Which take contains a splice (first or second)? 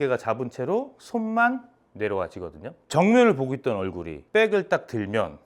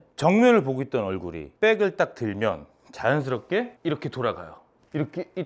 second